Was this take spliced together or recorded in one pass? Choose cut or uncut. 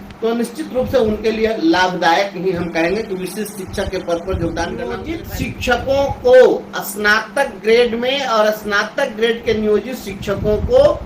cut